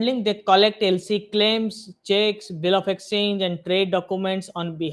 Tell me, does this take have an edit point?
no; 0 cuts

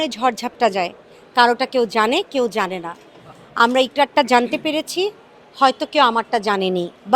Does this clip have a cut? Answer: no; 0 cuts

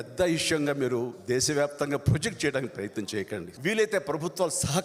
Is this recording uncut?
no; 1 cut; at 3.5 s

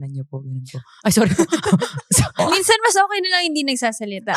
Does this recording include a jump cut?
yes; 1 cut; at 2.4 s

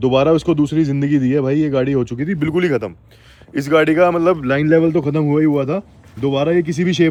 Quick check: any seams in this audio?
no; 0 cuts

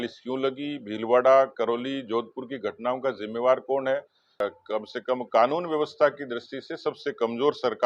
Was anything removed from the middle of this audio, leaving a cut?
yes; 1 cut; at 4.4 s

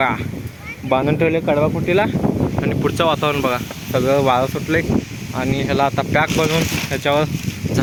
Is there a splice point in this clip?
no; 0 cuts

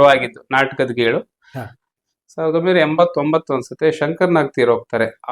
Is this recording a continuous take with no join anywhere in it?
no; 1 cut; at 2.0 s

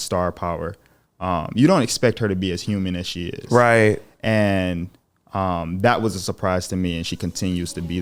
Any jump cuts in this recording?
no; 0 cuts

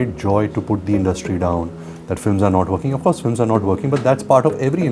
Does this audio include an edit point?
no; 0 cuts

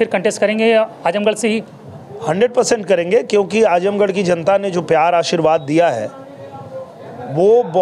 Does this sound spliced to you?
no; 0 cuts

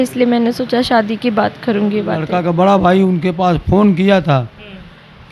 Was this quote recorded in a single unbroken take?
no; 1 cut; at 2.3 s

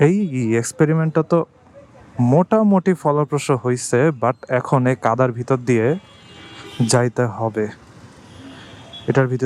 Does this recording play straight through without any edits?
yes; 0 cuts

